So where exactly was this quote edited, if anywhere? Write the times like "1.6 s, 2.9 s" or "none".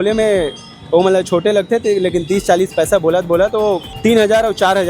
3.9 s